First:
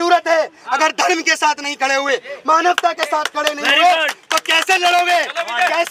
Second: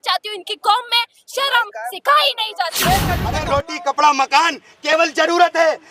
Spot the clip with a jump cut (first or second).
second